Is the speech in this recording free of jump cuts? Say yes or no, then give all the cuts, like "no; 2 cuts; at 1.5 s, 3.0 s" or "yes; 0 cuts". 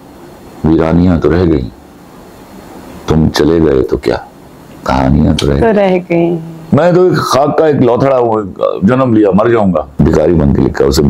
no; 2 cuts; at 6.5 s, 9.9 s